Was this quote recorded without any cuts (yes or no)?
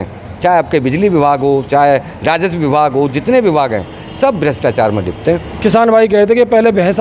no